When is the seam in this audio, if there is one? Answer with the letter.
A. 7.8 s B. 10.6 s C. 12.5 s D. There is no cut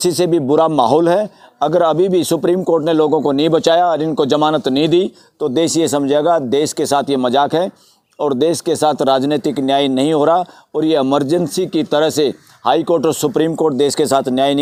D